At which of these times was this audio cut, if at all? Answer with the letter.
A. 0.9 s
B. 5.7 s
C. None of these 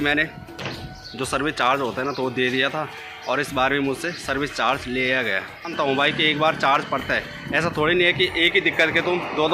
B